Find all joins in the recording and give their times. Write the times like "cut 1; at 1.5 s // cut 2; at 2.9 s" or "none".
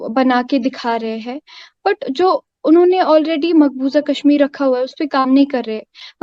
none